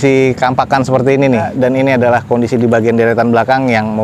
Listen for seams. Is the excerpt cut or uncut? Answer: cut